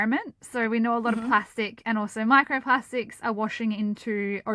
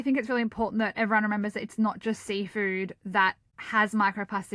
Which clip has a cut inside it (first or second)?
second